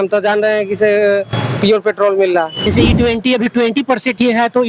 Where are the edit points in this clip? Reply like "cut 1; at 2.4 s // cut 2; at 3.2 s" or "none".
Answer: cut 1; at 2.7 s